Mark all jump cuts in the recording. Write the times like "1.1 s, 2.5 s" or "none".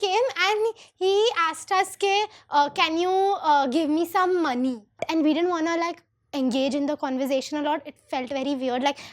5.0 s